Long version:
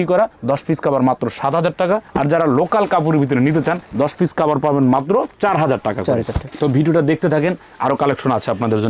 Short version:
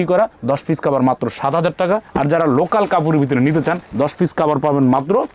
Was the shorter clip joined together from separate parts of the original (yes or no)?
no